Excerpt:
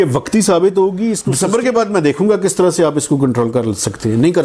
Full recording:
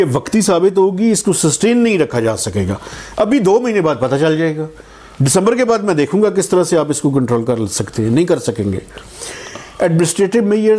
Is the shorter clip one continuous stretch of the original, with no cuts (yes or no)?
no